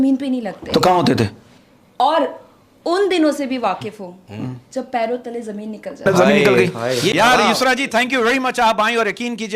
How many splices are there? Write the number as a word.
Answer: one